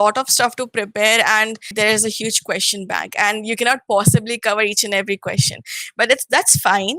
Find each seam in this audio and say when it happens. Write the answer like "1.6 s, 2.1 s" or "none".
1.7 s